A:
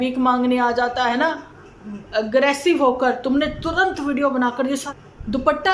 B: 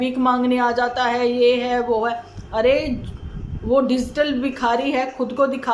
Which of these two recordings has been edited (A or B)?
A